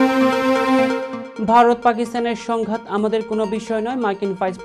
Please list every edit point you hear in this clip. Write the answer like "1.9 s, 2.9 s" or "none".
1.1 s